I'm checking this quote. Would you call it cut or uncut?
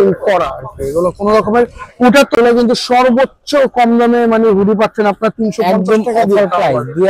cut